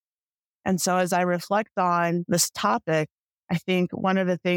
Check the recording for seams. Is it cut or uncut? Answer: cut